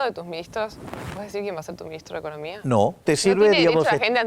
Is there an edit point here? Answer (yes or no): yes